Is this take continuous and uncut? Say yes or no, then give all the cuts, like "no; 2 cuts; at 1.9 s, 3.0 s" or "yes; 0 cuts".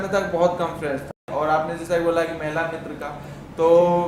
no; 1 cut; at 1.2 s